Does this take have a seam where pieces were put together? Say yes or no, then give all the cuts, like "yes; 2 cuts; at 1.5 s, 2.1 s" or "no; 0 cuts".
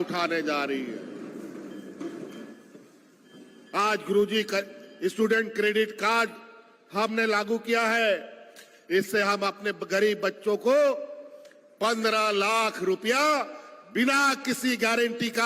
no; 0 cuts